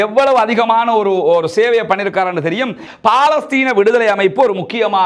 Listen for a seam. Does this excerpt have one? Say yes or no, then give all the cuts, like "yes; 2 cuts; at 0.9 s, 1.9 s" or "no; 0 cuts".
yes; 1 cut; at 2.8 s